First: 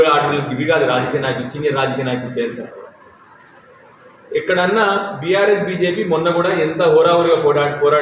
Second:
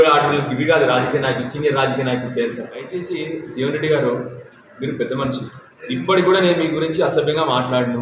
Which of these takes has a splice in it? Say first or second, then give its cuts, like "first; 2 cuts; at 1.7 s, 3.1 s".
second; 1 cut; at 3.0 s